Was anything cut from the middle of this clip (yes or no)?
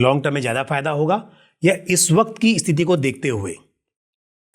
no